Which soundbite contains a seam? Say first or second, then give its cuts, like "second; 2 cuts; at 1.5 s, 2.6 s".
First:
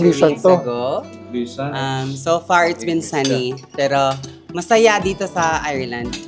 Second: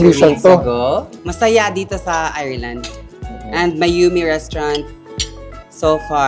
second; 1 cut; at 1.2 s